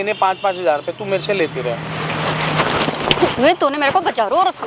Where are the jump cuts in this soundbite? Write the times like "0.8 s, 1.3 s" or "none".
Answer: none